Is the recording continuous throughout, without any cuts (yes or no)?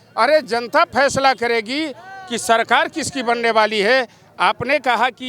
yes